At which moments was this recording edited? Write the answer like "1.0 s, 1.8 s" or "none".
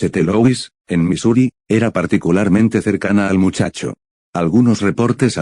3.5 s

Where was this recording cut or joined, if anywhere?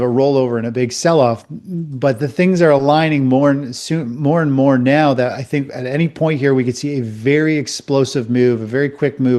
none

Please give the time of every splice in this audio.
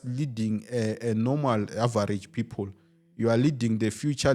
none

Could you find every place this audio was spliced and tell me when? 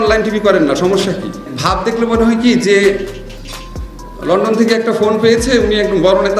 1.5 s

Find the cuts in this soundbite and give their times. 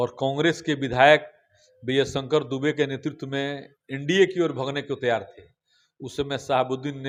none

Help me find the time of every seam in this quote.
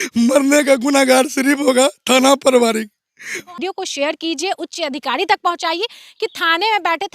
3.6 s

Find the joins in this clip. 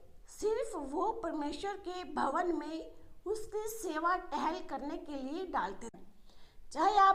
5.9 s

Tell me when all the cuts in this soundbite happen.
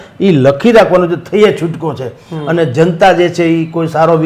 none

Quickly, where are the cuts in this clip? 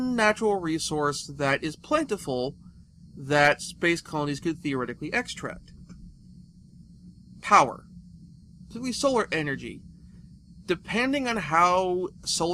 none

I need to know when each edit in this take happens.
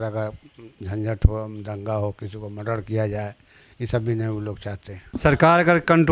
5.1 s

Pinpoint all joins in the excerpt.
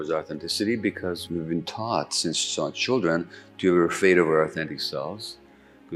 1.2 s

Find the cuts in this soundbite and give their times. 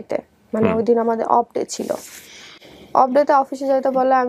none

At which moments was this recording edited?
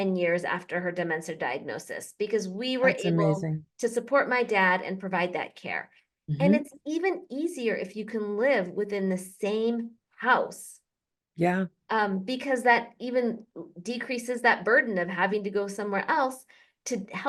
none

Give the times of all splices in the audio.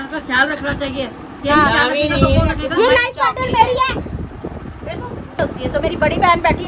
4.2 s, 5.4 s

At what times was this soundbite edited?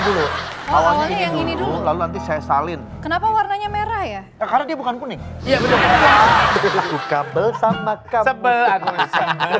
6.6 s

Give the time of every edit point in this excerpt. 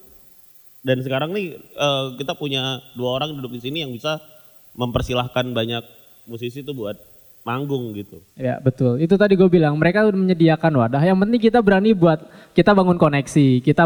none

